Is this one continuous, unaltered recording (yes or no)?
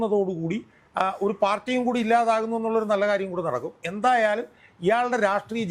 yes